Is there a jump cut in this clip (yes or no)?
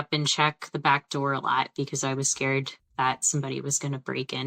no